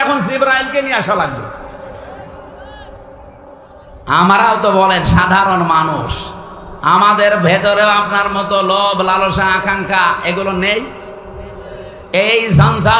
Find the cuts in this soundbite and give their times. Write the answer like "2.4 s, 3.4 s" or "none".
4.0 s